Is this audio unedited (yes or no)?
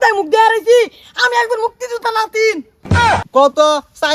no